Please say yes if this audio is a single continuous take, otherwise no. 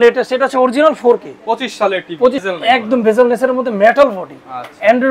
no